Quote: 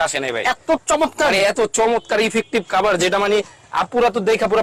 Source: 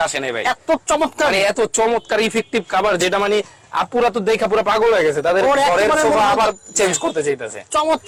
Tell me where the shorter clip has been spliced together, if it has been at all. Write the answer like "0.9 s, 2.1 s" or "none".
none